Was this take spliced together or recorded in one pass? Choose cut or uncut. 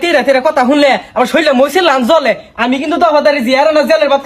uncut